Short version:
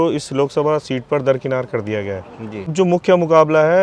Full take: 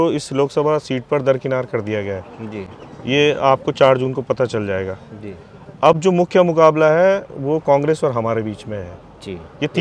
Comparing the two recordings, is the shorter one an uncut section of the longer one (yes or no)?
no